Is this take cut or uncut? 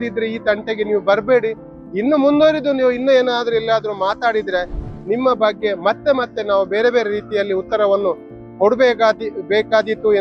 uncut